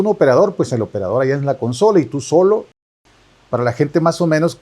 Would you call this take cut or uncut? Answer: cut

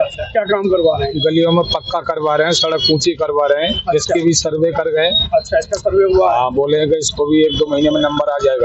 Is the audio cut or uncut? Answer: uncut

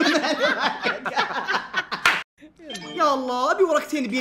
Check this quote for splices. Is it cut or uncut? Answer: cut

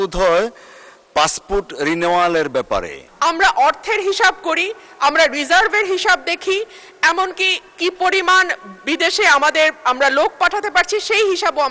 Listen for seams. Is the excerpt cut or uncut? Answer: cut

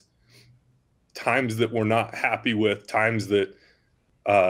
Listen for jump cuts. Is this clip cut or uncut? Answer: uncut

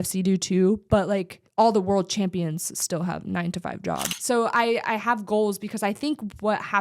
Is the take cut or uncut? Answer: cut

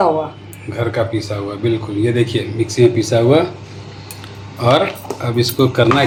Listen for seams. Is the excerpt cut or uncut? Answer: uncut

